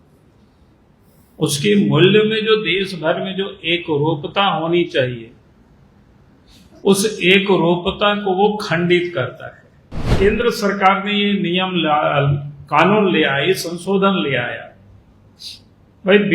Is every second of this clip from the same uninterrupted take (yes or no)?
no